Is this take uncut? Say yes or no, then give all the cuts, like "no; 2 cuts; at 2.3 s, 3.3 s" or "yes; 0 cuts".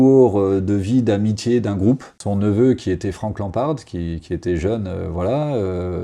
no; 1 cut; at 2.2 s